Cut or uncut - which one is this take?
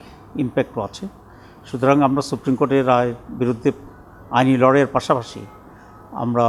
uncut